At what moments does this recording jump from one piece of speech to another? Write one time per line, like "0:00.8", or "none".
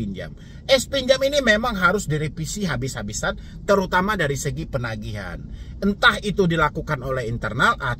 none